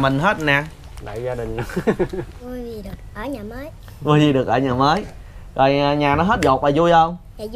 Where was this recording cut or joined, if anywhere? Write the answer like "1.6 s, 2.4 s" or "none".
2.4 s